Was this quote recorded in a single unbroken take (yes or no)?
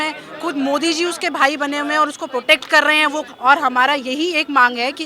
no